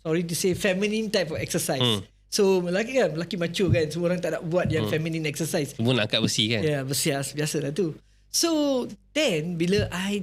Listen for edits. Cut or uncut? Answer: uncut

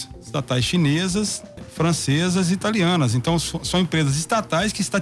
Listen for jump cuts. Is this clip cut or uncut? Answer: cut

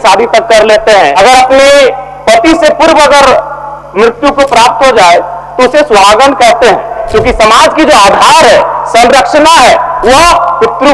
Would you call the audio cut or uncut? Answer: cut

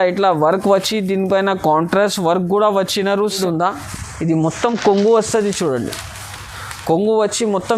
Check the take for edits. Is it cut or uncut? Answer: cut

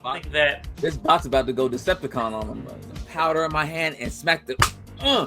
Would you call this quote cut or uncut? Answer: cut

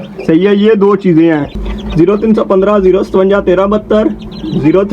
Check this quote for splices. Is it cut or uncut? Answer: cut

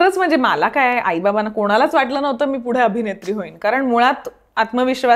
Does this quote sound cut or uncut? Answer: uncut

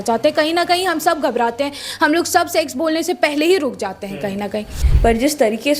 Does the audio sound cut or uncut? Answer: cut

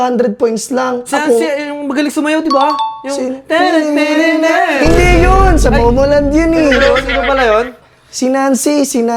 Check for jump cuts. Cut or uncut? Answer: uncut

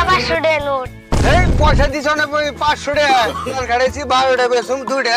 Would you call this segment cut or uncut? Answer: cut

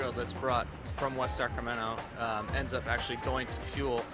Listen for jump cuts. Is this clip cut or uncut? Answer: uncut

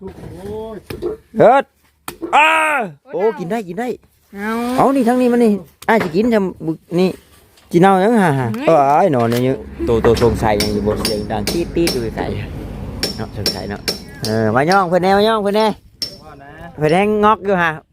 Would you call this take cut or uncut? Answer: cut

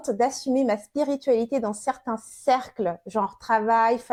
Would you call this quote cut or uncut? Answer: uncut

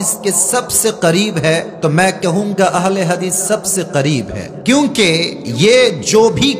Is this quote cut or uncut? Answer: cut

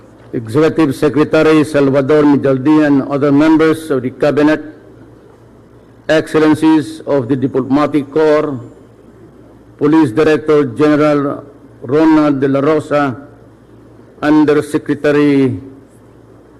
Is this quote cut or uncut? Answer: cut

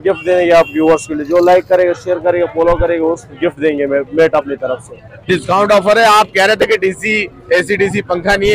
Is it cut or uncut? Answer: cut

